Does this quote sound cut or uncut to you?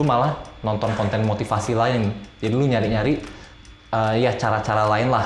uncut